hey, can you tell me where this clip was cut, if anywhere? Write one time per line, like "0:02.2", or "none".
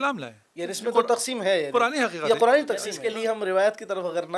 0:02.9